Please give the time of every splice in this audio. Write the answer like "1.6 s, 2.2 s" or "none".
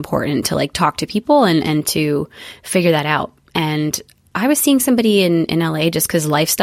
none